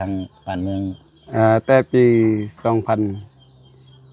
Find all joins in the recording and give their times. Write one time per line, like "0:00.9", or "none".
none